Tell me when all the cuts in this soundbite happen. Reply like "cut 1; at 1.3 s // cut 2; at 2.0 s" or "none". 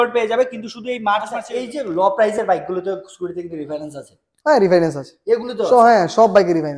cut 1; at 1.4 s